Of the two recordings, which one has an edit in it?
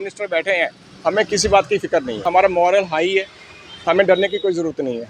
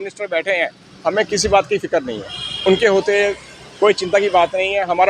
first; 1 cut; at 2.2 s

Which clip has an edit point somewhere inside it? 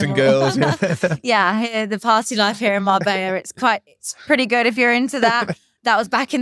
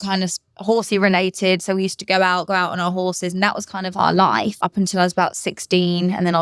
second; 1 cut; at 4.5 s

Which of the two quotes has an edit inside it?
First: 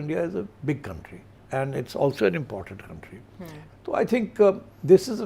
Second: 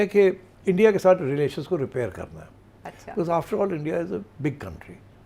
first; 1 cut; at 3.6 s

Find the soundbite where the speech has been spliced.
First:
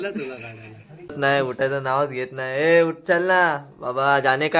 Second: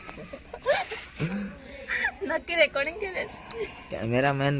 first; 1 cut; at 1.2 s

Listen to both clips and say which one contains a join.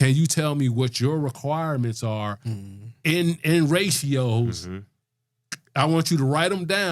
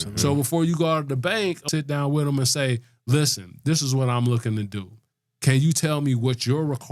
second; 1 cut; at 1.6 s

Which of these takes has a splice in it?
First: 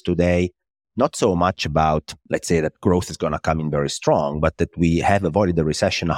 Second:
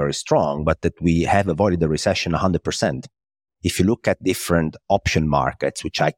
first; 1 cut; at 2.2 s

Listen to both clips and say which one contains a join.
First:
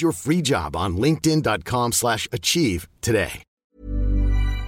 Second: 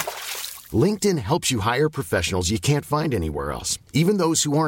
first; 1 cut; at 3.5 s

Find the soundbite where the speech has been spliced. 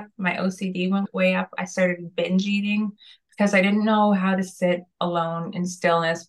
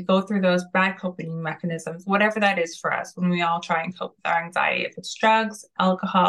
first; 1 cut; at 1.1 s

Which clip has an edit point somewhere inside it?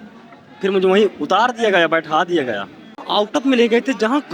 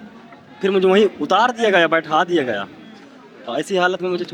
first; 1 cut; at 3.0 s

